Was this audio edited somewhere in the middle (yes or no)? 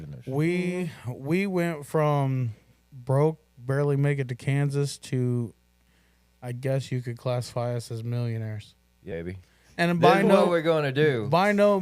yes